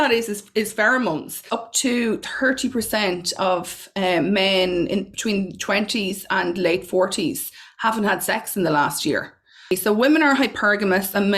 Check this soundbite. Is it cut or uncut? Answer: cut